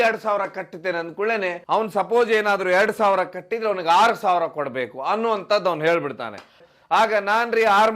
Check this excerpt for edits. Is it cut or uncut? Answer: cut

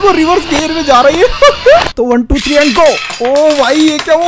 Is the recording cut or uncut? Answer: cut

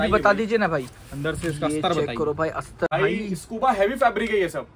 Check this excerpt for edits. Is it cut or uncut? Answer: cut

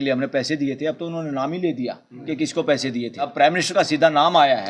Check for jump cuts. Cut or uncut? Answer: cut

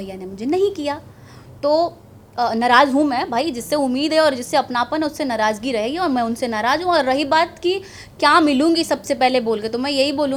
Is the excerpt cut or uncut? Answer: uncut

